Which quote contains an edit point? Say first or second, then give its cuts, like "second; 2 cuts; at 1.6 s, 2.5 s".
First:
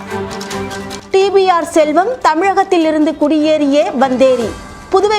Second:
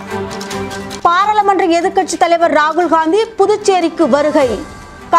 first; 1 cut; at 0.9 s